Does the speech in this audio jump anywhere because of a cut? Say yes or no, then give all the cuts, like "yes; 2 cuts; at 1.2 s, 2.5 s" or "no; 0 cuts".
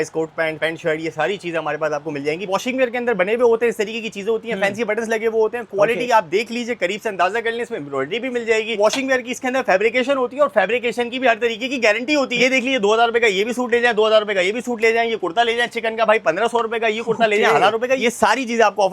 yes; 4 cuts; at 2.5 s, 8.7 s, 12.3 s, 18.0 s